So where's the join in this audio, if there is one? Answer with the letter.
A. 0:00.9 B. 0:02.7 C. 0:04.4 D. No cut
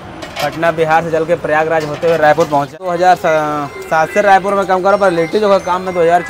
B